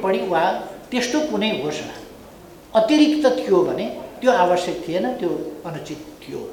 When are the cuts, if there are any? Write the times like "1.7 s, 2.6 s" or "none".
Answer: none